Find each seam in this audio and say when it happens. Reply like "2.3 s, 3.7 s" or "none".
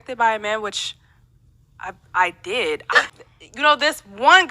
3.1 s